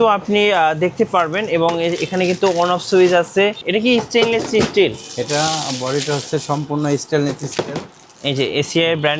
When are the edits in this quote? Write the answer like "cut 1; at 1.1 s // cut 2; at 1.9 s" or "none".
cut 1; at 3.6 s